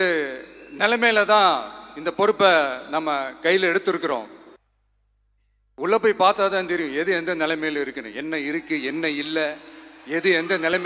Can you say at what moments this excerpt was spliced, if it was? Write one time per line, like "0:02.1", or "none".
0:04.6